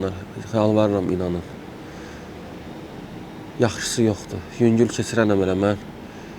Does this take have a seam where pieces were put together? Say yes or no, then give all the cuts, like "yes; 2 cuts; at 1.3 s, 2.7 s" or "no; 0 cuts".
no; 0 cuts